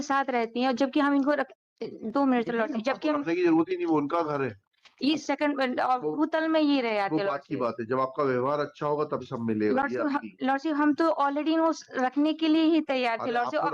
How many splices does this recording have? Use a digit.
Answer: 1